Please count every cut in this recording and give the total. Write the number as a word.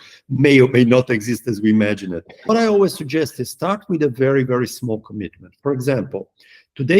one